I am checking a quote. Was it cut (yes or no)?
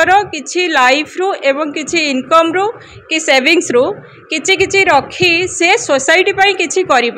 no